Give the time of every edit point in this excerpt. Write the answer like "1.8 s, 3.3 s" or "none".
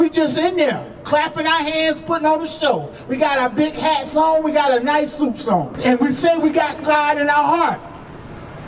5.7 s